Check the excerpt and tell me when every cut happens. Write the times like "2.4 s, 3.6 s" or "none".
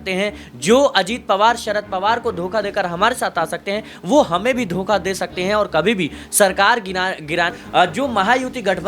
7.6 s

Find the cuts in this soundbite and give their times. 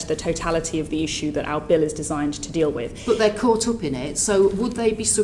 none

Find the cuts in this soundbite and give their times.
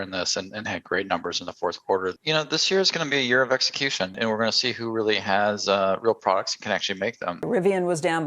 2.1 s, 4.2 s, 7.4 s

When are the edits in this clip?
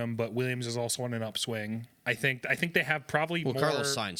none

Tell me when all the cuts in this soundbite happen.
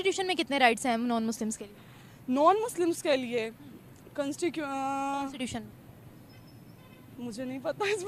none

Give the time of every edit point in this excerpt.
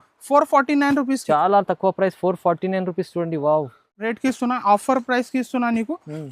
3.9 s

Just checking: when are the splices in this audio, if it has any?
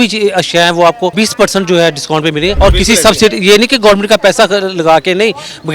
1.1 s, 2.5 s

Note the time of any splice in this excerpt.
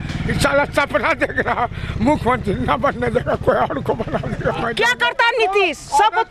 4.7 s

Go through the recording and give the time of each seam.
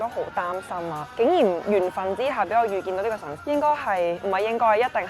3.4 s

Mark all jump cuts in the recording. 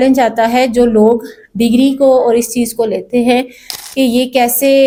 none

